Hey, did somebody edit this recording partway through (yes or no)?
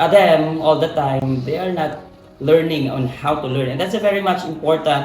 no